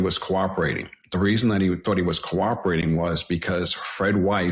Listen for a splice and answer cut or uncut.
uncut